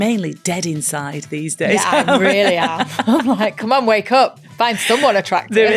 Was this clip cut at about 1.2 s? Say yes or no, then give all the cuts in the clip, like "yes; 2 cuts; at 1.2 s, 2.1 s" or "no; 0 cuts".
no; 1 cut; at 4.4 s